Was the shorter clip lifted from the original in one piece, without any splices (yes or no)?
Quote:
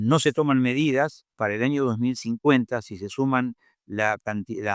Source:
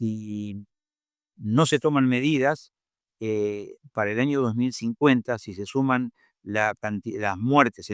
no